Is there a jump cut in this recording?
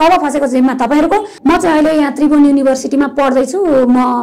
yes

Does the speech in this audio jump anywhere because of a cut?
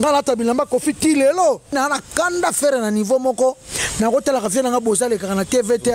yes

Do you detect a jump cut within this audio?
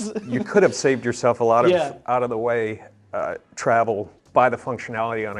yes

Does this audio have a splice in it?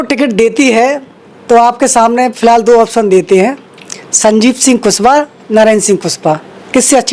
no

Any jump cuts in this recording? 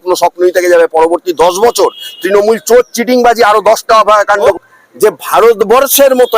yes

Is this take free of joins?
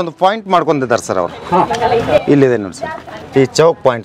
yes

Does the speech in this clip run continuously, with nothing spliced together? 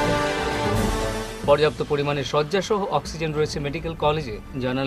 no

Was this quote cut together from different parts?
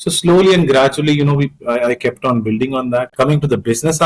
yes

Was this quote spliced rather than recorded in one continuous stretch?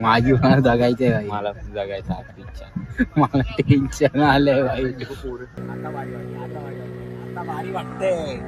yes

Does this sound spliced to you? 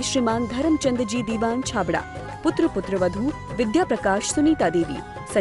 no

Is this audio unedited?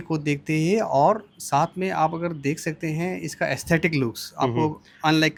yes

